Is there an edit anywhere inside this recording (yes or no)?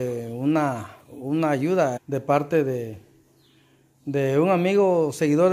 yes